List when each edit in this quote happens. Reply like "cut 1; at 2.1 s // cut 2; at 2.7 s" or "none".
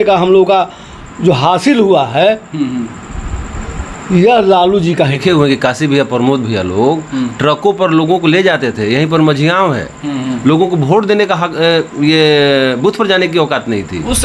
cut 1; at 5.2 s